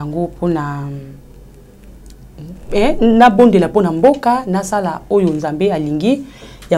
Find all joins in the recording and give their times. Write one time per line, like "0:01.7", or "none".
none